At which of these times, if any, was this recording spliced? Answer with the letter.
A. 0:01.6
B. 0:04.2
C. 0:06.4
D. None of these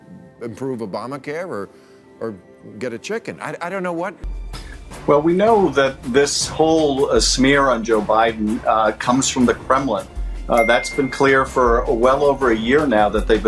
B